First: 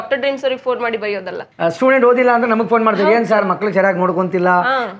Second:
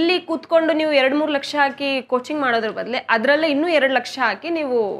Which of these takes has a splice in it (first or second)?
first